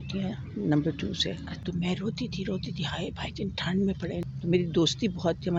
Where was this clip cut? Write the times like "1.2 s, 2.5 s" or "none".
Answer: 1.5 s, 4.3 s